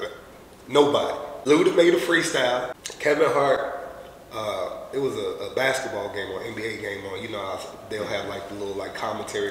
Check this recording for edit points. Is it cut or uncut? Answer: cut